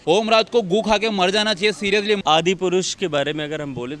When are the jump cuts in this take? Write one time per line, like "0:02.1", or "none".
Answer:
0:02.2